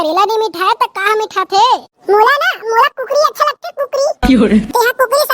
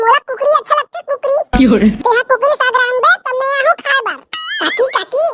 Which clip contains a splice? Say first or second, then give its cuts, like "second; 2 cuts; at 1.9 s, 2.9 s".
second; 1 cut; at 4.2 s